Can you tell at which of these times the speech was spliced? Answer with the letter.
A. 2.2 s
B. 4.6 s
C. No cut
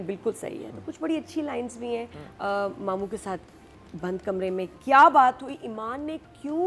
A